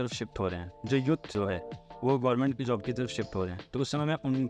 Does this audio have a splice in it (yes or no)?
yes